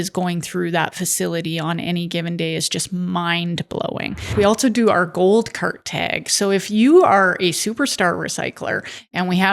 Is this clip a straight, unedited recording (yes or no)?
no